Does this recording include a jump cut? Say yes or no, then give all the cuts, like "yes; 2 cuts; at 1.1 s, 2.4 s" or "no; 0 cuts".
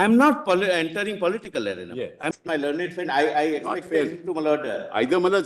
yes; 1 cut; at 2.3 s